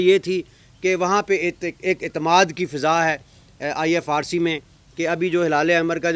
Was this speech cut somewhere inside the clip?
no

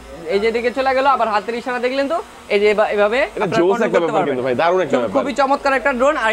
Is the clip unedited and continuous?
yes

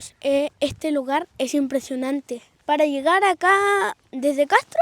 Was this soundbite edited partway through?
yes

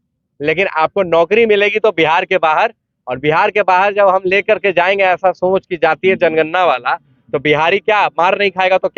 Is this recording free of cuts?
yes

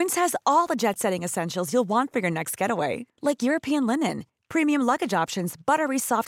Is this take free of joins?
yes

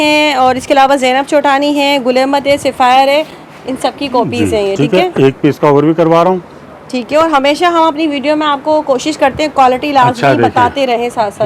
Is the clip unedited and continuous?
yes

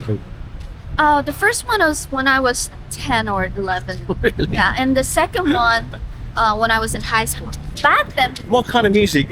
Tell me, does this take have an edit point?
yes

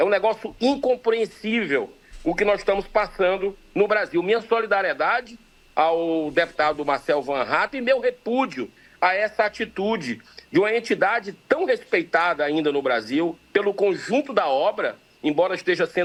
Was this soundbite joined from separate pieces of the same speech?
no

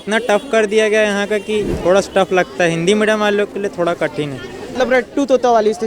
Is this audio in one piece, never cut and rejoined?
no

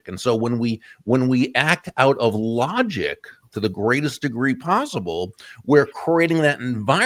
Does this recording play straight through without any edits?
yes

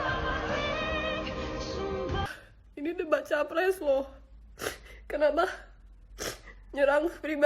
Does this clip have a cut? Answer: yes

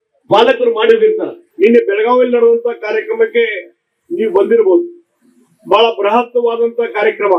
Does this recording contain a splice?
yes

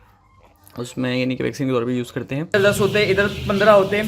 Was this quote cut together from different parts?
yes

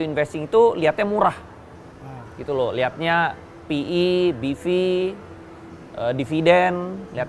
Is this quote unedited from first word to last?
yes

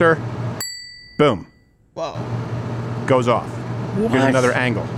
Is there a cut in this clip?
no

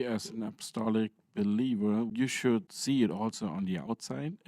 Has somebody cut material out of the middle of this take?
yes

